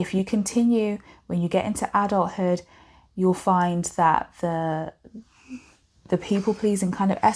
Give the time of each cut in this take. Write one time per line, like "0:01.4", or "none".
none